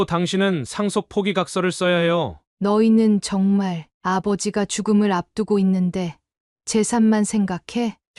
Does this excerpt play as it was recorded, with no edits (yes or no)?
no